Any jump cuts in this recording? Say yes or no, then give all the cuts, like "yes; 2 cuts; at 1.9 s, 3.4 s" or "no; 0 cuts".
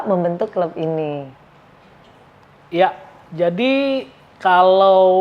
no; 0 cuts